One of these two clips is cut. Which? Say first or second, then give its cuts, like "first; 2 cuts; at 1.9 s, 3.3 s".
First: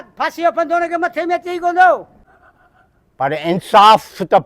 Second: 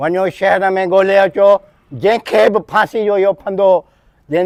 first; 1 cut; at 2.2 s